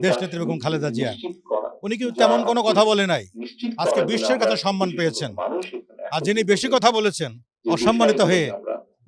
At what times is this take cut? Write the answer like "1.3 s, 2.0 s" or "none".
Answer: none